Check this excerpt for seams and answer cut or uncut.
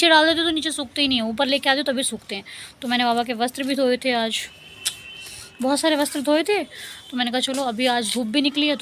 uncut